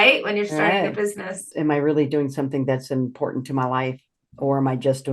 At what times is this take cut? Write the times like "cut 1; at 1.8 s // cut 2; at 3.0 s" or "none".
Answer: cut 1; at 1.4 s